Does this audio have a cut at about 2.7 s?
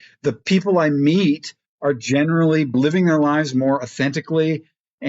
yes; 1 cut; at 2.7 s

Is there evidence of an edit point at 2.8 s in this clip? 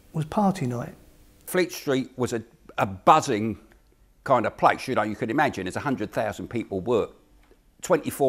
no; 1 cut; at 1.4 s

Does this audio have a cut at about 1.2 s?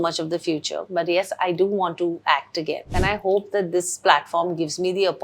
no; 1 cut; at 2.9 s

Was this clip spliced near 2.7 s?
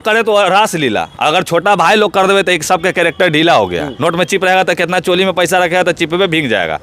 no; 1 cut; at 3.9 s

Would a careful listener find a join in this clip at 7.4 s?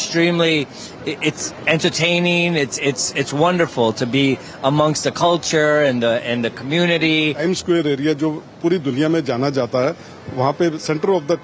yes; 1 cut; at 7.4 s

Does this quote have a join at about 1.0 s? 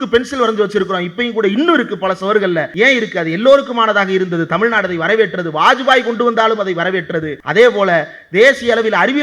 no; 2 cuts; at 2.7 s, 7.4 s

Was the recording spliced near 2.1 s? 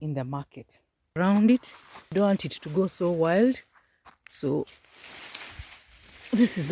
yes; 2 cuts; at 1.1 s, 2.1 s

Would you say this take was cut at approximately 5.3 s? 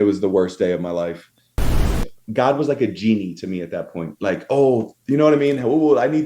no; 1 cut; at 1.7 s

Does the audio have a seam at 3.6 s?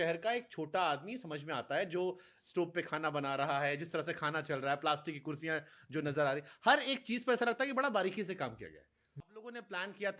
no; 0 cuts

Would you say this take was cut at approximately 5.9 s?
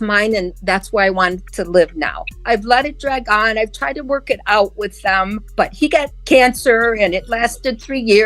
yes; 2 cuts; at 2.4 s, 5.9 s

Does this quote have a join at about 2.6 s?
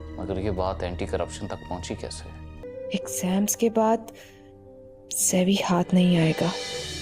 yes; 1 cut; at 2.6 s

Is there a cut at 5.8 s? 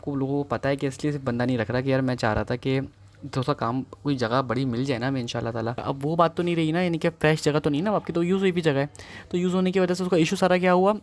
yes; 1 cut; at 5.8 s

